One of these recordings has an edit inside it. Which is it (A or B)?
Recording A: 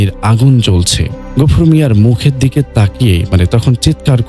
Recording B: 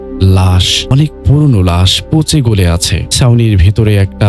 B